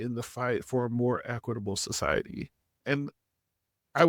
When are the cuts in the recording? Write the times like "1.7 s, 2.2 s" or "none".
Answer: 2.8 s